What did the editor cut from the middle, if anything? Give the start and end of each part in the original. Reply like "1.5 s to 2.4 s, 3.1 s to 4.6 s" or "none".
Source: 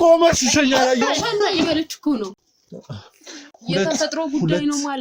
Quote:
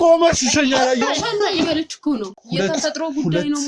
2.4 s to 3.5 s